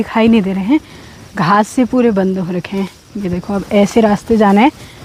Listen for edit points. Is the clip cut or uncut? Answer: uncut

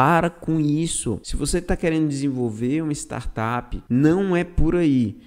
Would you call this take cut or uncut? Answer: cut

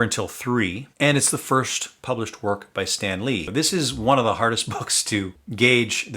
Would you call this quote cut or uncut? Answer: cut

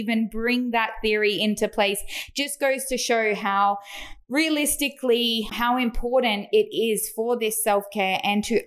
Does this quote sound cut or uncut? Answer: cut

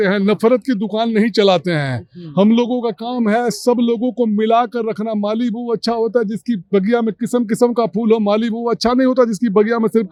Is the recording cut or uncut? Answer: uncut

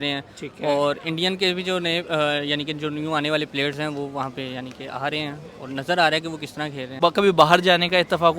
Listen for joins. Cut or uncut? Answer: cut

